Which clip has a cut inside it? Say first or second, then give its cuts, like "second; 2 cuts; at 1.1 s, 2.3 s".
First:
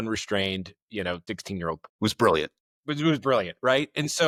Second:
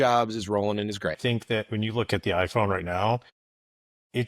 second; 1 cut; at 1.2 s